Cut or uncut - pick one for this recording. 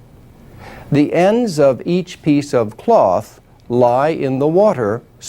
cut